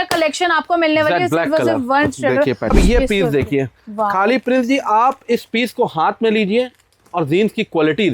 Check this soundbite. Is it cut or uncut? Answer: cut